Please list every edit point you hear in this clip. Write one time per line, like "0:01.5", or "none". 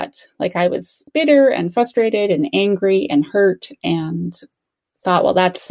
none